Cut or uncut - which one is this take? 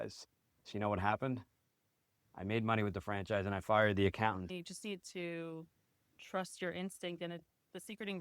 cut